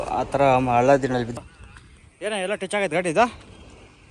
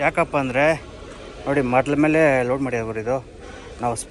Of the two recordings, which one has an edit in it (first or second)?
first